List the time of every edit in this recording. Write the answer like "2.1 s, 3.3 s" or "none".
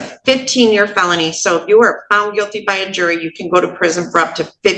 none